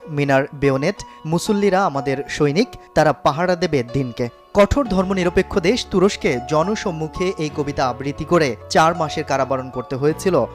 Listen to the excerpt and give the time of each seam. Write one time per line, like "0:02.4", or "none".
none